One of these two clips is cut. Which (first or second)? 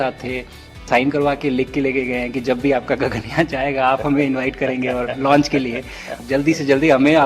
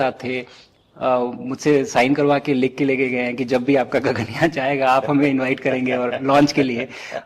first